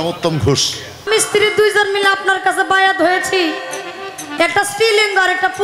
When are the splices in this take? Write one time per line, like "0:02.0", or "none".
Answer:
0:01.1